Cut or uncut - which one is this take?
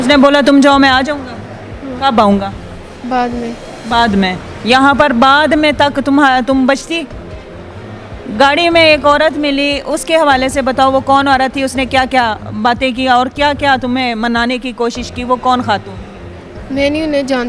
uncut